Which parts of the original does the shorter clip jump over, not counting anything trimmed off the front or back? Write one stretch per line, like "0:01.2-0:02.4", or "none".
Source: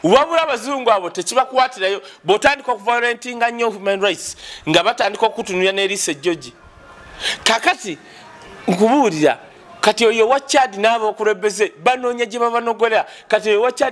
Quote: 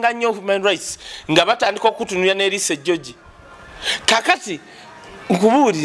none